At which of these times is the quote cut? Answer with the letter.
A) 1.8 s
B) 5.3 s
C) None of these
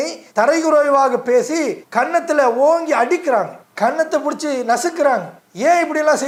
C